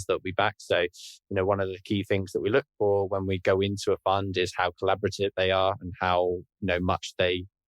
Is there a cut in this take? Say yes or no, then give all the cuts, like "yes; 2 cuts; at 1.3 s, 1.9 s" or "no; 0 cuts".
yes; 1 cut; at 5.3 s